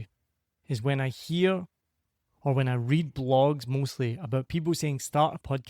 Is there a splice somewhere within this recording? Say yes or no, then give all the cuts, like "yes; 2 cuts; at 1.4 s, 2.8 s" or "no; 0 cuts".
no; 0 cuts